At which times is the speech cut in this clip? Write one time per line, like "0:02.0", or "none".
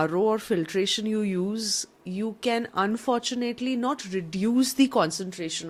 none